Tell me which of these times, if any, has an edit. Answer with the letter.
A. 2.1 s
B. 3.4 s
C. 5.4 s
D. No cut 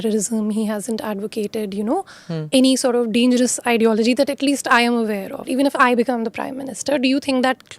C